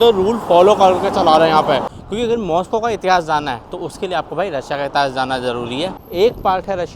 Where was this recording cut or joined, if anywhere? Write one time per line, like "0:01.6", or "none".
0:01.9
0:06.0